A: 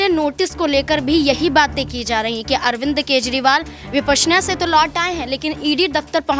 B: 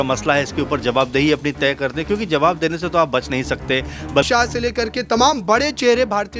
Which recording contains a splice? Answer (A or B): B